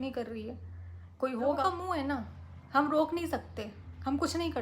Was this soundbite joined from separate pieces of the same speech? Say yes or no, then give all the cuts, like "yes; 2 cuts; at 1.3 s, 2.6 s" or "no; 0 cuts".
no; 0 cuts